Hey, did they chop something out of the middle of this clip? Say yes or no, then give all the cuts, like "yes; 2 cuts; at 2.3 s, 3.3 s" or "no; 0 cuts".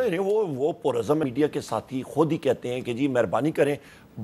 yes; 1 cut; at 1.2 s